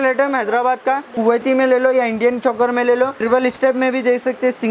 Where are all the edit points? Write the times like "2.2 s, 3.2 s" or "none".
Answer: 1.1 s, 3.2 s